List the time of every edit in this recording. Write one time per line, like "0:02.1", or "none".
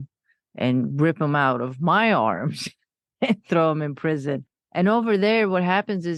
none